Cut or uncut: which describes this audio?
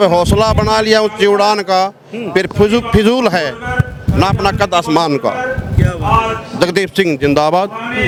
uncut